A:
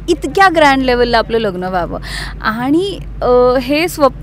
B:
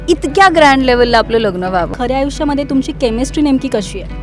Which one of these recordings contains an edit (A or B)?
B